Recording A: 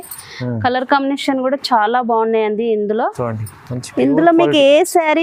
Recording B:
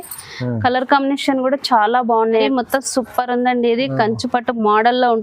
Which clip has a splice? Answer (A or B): B